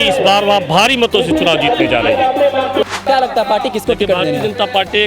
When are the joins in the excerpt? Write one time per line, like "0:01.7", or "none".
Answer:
0:02.9